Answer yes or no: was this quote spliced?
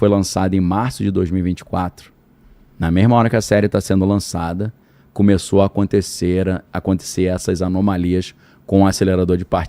no